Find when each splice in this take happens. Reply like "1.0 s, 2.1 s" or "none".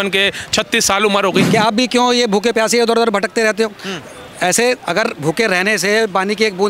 1.4 s